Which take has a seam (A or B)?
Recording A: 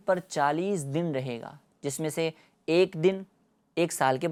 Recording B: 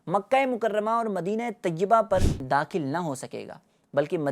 B